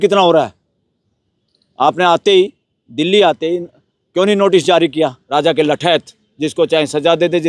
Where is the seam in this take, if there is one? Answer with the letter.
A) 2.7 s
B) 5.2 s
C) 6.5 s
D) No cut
B